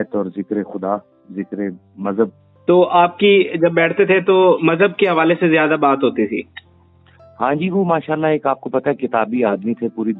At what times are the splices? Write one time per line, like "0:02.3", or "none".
none